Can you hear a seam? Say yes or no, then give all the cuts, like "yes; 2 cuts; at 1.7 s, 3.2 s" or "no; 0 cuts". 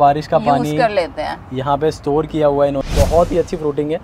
yes; 1 cut; at 2.8 s